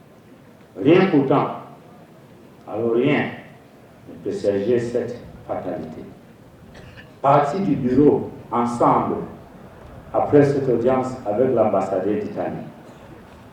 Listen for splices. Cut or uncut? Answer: uncut